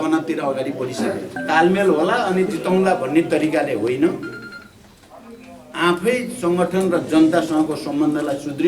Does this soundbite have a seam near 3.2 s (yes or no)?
no